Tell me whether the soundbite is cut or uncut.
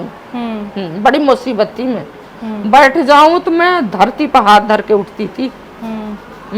uncut